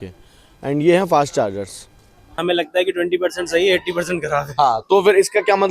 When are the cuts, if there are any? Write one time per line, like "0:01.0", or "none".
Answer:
0:02.4